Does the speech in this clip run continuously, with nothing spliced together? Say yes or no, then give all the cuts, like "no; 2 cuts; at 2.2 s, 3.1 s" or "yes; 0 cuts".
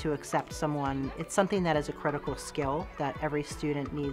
no; 1 cut; at 1.1 s